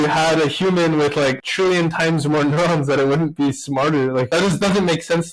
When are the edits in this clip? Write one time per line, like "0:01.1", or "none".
none